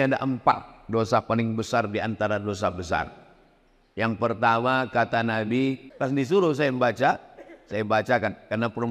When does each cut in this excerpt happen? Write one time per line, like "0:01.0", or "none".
0:05.9